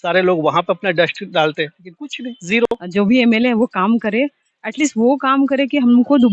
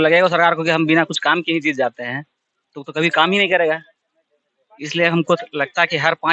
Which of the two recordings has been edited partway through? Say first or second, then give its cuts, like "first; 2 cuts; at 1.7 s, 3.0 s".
first; 1 cut; at 2.7 s